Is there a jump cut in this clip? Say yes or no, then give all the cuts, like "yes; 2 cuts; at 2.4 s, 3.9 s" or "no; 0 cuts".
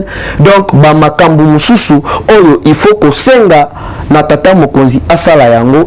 no; 0 cuts